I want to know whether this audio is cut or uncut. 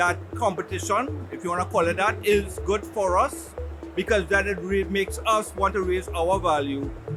uncut